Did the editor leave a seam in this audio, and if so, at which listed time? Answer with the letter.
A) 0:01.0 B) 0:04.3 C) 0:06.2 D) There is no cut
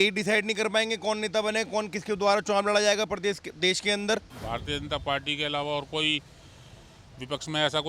B